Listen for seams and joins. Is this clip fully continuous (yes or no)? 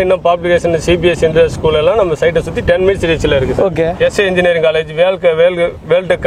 no